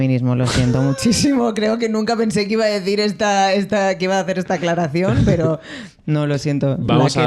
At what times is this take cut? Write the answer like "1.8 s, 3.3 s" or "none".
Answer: none